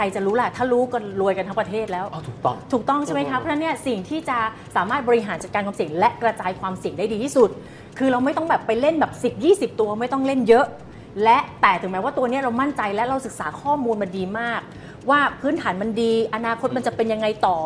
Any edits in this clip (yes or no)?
no